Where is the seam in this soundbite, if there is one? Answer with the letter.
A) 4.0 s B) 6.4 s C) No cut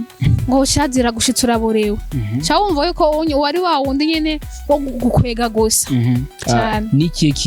B